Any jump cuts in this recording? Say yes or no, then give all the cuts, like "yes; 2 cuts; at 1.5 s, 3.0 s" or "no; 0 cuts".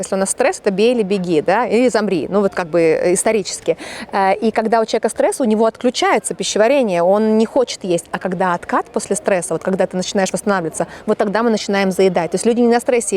no; 0 cuts